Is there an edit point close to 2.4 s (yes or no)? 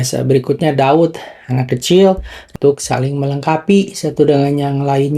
yes